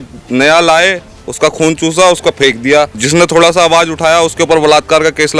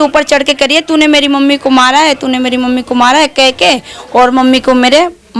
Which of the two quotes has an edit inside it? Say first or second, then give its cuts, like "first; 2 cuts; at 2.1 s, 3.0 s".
first; 1 cut; at 3.0 s